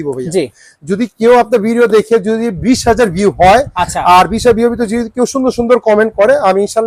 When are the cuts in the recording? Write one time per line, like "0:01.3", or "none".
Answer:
none